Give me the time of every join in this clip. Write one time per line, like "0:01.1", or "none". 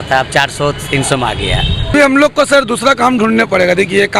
0:01.8